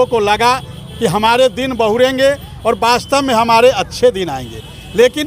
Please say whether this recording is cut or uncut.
uncut